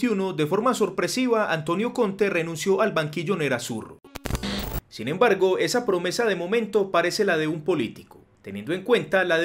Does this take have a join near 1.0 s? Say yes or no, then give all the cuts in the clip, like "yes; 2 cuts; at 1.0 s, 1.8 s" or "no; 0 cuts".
no; 1 cut; at 4.4 s